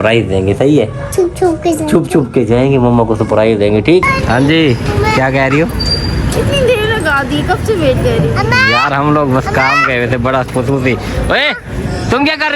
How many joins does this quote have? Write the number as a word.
one